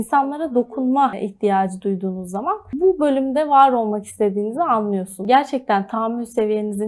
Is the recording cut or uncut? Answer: cut